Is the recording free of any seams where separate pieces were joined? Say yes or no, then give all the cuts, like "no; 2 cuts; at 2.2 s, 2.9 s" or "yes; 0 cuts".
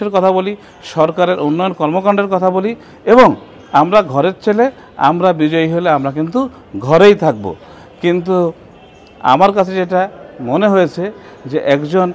yes; 0 cuts